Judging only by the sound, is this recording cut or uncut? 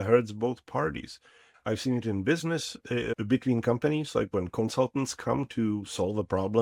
cut